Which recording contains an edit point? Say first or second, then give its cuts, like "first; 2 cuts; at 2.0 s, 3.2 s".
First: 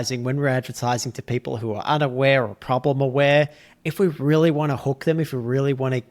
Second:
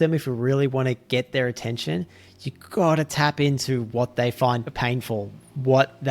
second; 1 cut; at 4.7 s